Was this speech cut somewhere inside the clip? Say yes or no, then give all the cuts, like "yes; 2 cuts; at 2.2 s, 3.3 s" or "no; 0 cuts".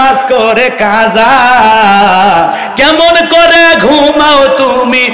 no; 0 cuts